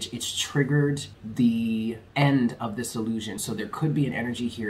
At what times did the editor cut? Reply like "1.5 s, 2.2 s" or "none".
1.2 s, 2.0 s, 3.4 s